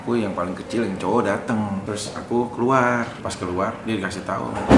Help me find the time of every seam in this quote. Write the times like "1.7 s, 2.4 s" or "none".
1.8 s, 3.2 s